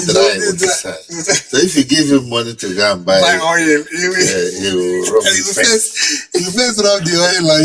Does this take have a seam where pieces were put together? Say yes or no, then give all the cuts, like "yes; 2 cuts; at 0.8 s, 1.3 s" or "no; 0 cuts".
no; 0 cuts